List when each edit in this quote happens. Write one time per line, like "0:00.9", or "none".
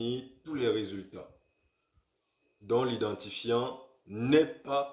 none

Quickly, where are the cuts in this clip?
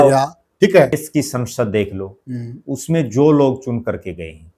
0:01.0

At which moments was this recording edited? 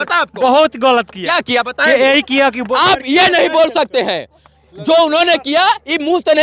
none

